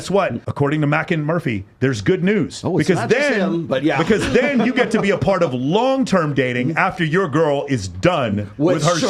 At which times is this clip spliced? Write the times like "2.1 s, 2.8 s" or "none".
none